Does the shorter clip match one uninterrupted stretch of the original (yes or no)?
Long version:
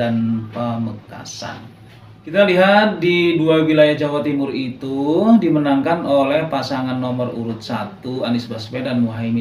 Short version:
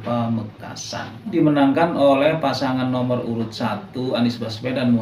no